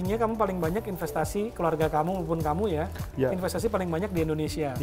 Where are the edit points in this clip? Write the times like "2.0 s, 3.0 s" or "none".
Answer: none